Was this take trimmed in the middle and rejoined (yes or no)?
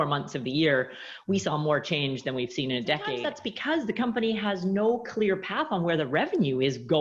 yes